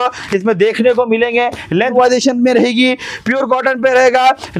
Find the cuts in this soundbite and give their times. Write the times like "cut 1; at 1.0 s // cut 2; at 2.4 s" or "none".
cut 1; at 1.9 s

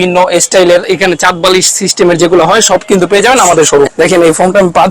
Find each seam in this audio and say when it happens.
cut 1; at 0.8 s // cut 2; at 3.9 s

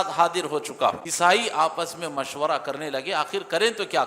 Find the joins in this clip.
cut 1; at 1.1 s

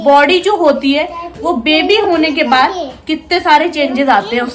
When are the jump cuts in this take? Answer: none

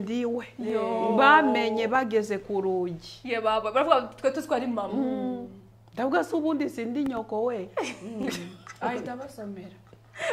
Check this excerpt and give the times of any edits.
none

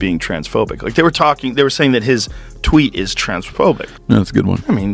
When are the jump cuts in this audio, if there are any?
cut 1; at 3.9 s

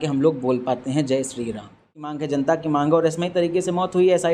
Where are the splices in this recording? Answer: cut 1; at 2.2 s

